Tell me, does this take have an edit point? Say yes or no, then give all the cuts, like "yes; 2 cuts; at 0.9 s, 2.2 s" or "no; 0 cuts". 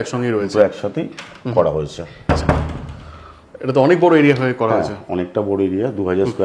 no; 0 cuts